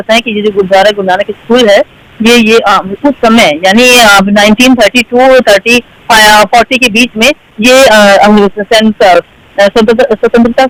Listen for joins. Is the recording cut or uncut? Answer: uncut